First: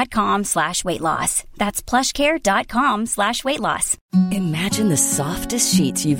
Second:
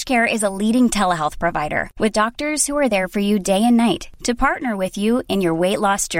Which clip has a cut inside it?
first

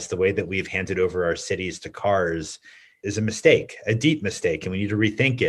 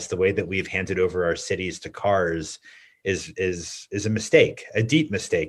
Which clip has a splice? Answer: first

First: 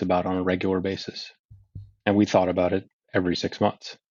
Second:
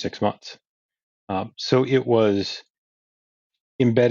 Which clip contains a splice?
second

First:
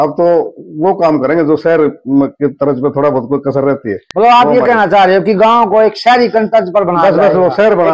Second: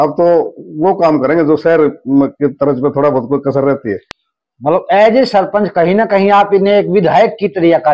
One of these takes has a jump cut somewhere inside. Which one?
second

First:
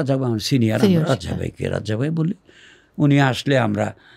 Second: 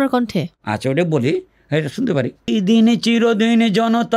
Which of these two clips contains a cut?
second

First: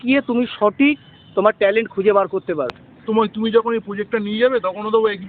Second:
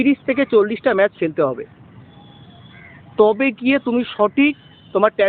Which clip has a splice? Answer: first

